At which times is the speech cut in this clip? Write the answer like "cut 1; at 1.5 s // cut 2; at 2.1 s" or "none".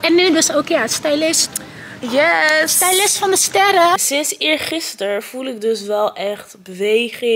cut 1; at 4.0 s

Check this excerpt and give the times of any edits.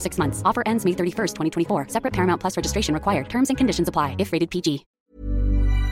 cut 1; at 4.9 s

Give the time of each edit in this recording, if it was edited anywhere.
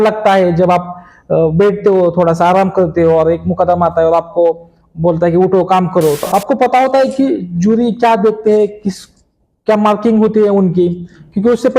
cut 1; at 6.2 s

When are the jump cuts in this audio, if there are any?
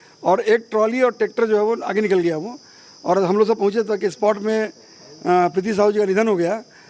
none

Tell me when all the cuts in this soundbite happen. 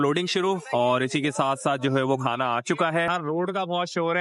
cut 1; at 3.1 s

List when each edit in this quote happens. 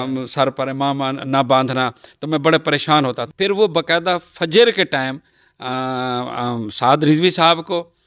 cut 1; at 3.2 s

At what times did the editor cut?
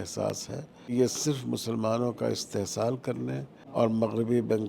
cut 1; at 0.9 s // cut 2; at 3.6 s

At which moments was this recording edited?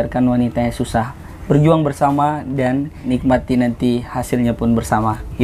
cut 1; at 2.9 s

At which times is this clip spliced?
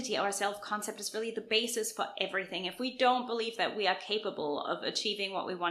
none

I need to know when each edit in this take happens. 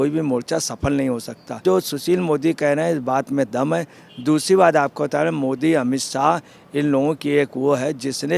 cut 1; at 1.6 s

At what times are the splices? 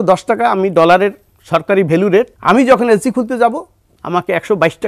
cut 1; at 2.3 s

